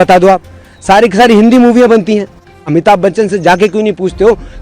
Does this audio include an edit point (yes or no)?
yes